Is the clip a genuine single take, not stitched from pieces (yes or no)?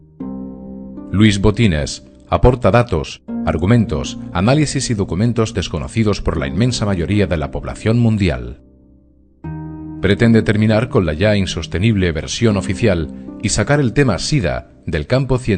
no